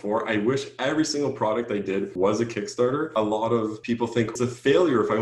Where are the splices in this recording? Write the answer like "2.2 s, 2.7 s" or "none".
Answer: 2.1 s, 3.1 s, 4.3 s